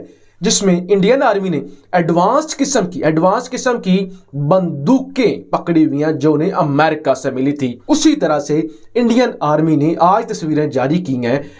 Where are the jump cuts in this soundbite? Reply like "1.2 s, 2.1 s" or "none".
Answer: 7.8 s